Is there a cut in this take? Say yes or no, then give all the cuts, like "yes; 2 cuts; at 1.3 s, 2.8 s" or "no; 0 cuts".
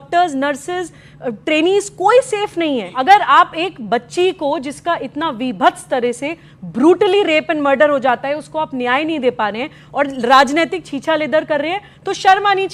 yes; 1 cut; at 2.9 s